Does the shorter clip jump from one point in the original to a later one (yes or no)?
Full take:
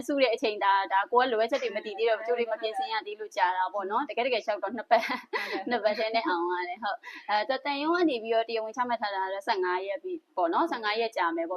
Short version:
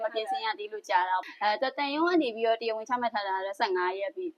yes